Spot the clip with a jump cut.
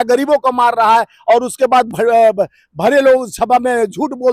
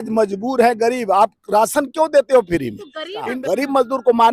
second; 1 cut; at 3.2 s

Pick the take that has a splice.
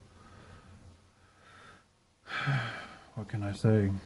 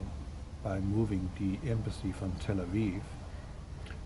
second; 1 cut; at 1.3 s

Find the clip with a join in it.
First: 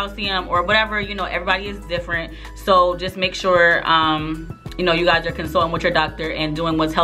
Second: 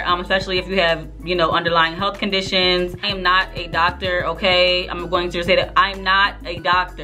second; 1 cut; at 3.1 s

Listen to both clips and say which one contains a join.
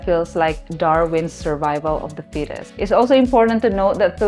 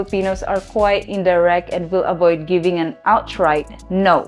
first; 1 cut; at 2.6 s

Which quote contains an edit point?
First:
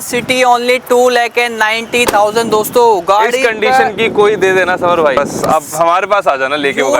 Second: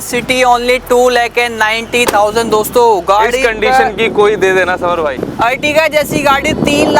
second; 1 cut; at 5.1 s

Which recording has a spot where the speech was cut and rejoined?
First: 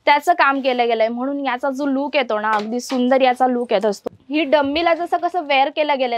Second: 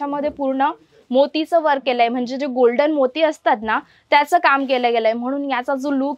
first; 1 cut; at 4.0 s

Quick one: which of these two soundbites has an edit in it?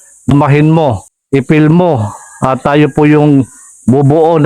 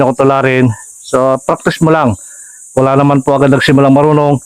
first; 1 cut; at 1.1 s

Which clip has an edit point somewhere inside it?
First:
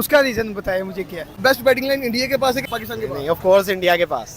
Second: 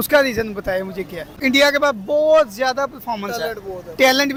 first; 2 cuts; at 1.4 s, 2.7 s

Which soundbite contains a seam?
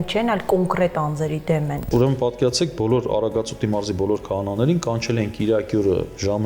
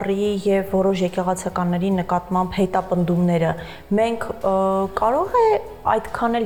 first; 1 cut; at 1.8 s

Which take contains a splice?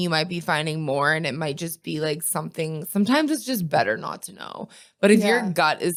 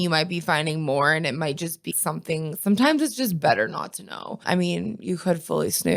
second; 2 cuts; at 1.9 s, 4.4 s

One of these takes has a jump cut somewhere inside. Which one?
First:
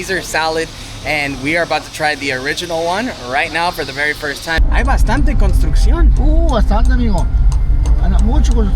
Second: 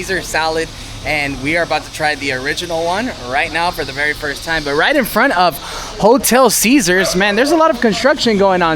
first; 1 cut; at 4.6 s

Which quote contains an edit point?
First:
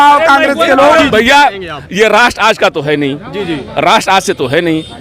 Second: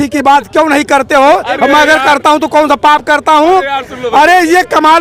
first; 1 cut; at 1.0 s

